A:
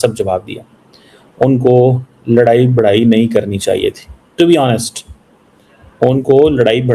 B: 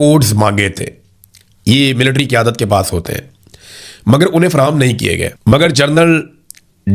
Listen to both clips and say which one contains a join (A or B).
B